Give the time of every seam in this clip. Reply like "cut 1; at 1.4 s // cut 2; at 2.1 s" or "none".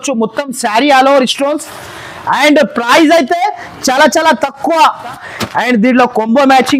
cut 1; at 5.2 s